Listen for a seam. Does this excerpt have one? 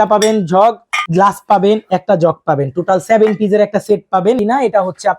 yes; 2 cuts; at 1.0 s, 4.4 s

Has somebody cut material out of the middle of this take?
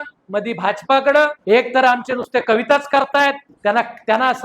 yes; 2 cuts; at 1.4 s, 3.5 s

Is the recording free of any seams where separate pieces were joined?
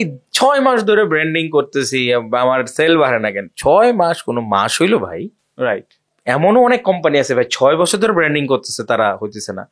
yes; 0 cuts

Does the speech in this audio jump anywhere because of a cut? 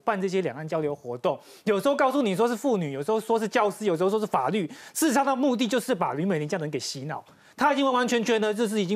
no; 0 cuts

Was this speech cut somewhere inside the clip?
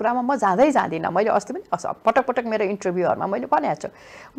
no; 0 cuts

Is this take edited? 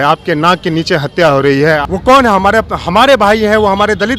yes; 1 cut; at 1.8 s

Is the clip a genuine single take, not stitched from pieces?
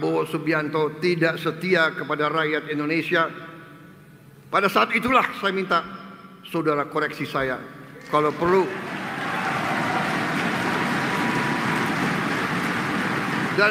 yes; 0 cuts

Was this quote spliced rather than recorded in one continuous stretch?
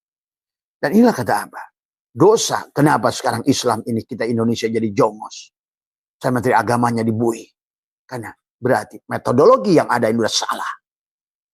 no; 0 cuts

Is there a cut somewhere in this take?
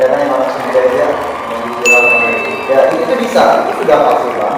no; 0 cuts

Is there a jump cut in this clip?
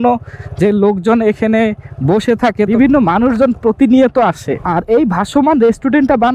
yes; 2 cuts; at 2.7 s, 4.6 s

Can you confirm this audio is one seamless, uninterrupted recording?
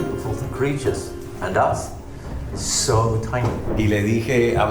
no; 1 cut; at 3.6 s

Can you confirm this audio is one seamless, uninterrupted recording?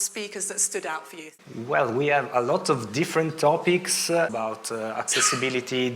no; 2 cuts; at 1.2 s, 4.3 s

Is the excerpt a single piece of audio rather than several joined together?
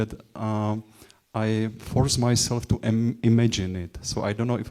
yes; 0 cuts

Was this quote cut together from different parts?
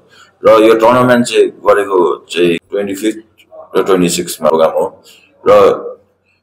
yes; 2 cuts; at 2.7 s, 4.5 s

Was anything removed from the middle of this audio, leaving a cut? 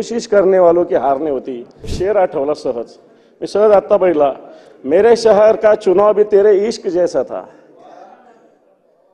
yes; 1 cut; at 1.9 s

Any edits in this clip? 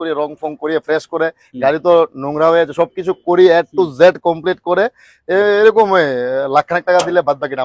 no; 0 cuts

